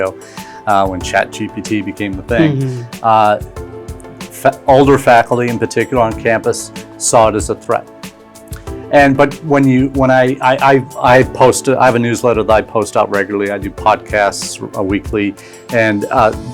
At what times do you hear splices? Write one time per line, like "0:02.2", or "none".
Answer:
none